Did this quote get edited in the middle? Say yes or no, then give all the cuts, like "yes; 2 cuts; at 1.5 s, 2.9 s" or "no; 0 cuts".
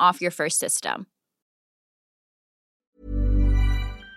no; 0 cuts